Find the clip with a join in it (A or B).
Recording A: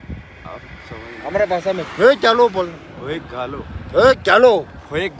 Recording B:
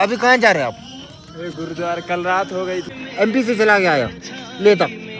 B